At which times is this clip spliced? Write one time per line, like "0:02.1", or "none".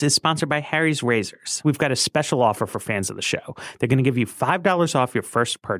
0:01.6